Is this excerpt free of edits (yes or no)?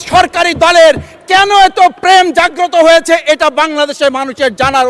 yes